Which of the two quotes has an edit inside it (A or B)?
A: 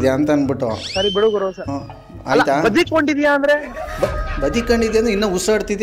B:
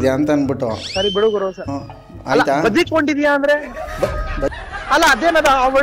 B